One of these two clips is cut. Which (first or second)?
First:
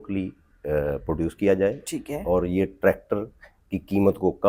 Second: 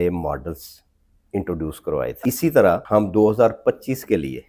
second